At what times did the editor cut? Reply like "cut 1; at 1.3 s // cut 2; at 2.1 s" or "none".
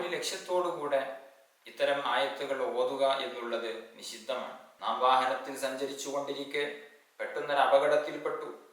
cut 1; at 4.6 s